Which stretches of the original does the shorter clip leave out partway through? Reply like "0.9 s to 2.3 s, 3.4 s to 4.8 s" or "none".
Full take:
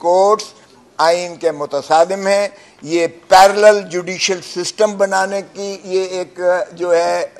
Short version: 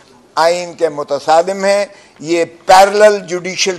none